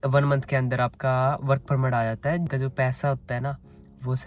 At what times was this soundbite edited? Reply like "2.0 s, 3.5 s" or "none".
2.5 s